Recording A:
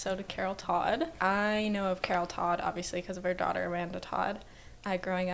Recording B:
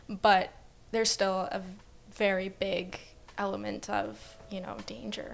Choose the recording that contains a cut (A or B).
A